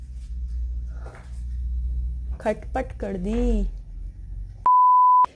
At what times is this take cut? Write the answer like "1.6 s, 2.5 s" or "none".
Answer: 4.4 s